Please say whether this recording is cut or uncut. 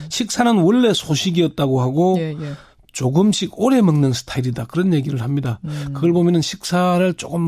uncut